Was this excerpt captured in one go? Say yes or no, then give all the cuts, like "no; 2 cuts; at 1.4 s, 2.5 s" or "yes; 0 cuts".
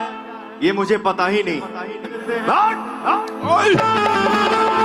no; 1 cut; at 2.2 s